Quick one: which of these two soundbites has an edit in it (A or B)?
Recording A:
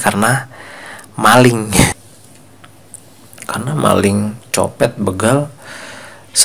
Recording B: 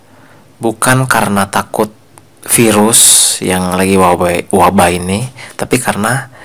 A